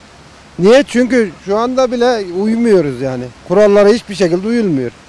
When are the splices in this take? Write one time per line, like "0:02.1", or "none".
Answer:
none